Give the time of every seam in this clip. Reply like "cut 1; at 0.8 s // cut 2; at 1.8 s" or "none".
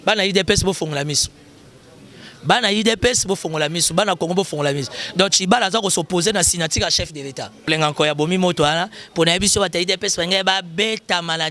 cut 1; at 7.7 s